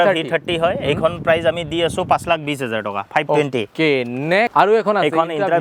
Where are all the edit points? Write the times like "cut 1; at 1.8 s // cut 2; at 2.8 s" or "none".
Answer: none